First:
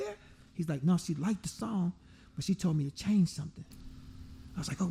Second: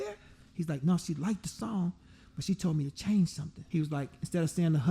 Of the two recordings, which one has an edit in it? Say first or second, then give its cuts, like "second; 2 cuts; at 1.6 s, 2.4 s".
second; 1 cut; at 3.6 s